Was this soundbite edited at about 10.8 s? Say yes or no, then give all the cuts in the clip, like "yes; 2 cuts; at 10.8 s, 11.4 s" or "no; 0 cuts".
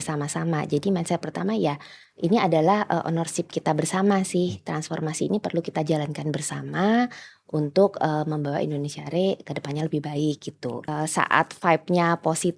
yes; 1 cut; at 10.8 s